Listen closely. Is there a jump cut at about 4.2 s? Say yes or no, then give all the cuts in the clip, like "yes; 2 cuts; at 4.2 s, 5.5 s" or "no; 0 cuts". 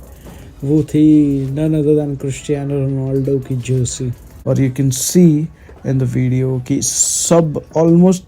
yes; 1 cut; at 4.2 s